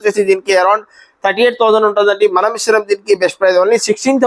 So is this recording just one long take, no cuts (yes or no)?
yes